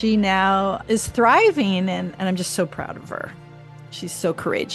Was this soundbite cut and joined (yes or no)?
yes